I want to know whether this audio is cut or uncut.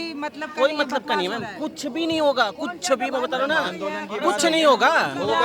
uncut